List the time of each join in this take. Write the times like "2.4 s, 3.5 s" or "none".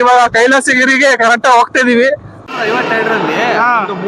2.4 s